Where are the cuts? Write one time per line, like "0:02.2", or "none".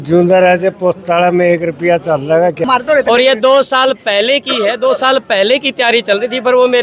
0:02.6

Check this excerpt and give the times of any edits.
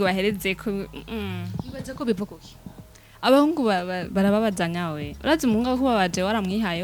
none

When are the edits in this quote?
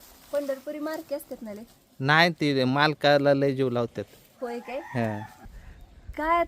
0:05.4

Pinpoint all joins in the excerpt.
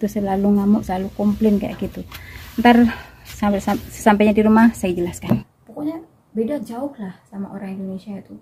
0:05.4

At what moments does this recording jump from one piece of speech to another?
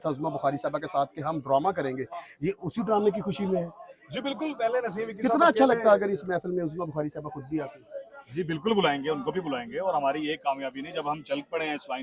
none

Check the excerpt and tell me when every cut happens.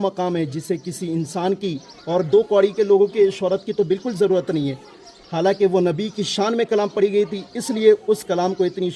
none

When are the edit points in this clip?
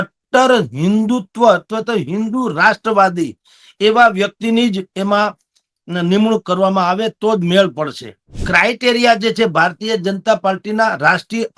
0:08.4

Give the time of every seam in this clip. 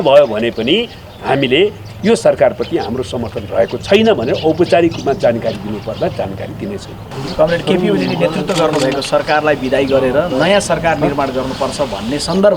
0:07.1

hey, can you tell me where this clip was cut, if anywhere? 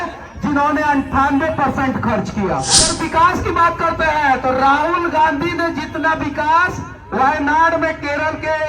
0:02.9

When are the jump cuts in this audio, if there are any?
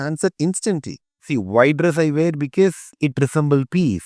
0:01.2
0:02.9

